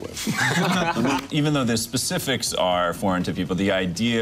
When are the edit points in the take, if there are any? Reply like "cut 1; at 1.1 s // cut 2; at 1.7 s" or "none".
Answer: cut 1; at 1.2 s